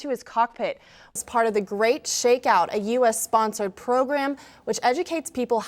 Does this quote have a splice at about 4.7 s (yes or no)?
no